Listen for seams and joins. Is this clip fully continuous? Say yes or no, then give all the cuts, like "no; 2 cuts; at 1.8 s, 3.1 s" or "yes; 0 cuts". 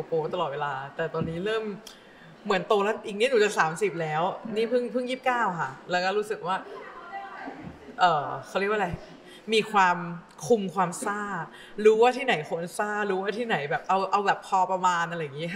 yes; 0 cuts